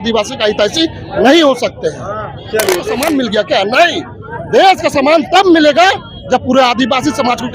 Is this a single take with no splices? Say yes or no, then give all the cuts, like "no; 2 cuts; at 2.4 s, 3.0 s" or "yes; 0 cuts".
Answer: no; 1 cut; at 2.9 s